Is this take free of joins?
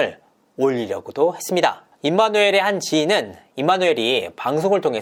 yes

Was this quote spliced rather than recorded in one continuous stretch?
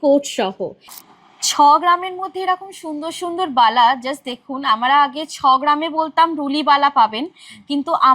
yes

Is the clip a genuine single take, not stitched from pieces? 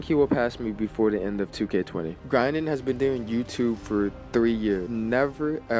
no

